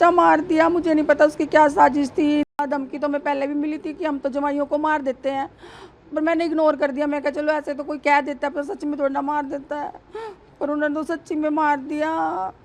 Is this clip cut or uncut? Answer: cut